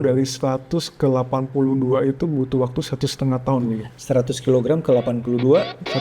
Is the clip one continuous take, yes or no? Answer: yes